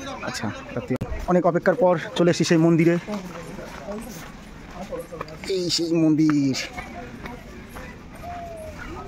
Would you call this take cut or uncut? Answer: cut